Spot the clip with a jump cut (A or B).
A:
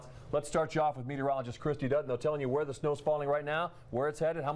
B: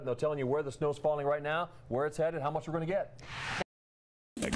B